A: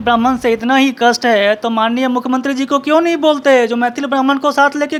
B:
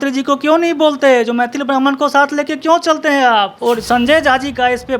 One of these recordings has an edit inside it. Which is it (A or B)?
B